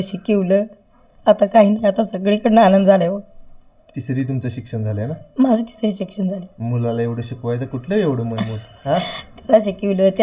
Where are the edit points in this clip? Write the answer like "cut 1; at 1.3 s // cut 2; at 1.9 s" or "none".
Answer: none

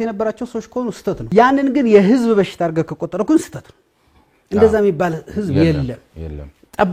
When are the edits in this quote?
cut 1; at 1.2 s

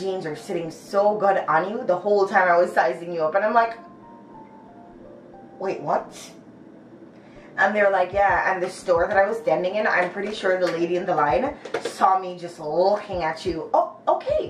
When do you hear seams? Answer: none

